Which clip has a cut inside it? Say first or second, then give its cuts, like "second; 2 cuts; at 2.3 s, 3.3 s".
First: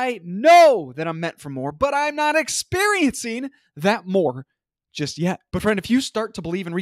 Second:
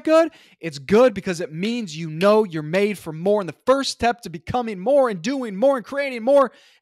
first; 1 cut; at 5.4 s